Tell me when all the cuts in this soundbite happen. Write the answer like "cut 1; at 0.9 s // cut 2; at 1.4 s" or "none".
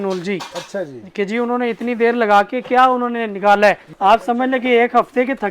cut 1; at 3.9 s